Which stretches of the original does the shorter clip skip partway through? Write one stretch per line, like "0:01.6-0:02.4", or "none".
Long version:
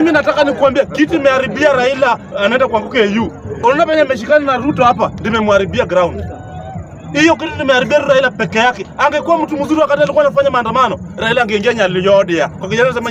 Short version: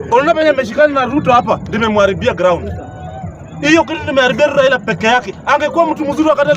none